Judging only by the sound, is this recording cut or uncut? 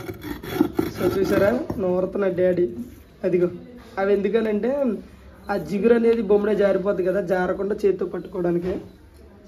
uncut